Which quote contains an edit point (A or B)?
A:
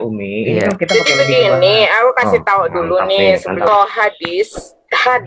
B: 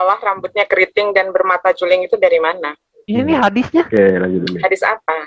A